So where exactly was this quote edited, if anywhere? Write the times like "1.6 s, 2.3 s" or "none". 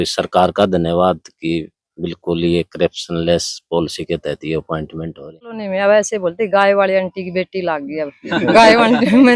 5.6 s